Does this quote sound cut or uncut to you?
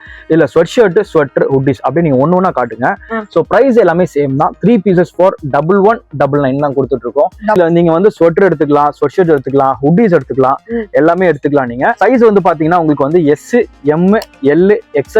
cut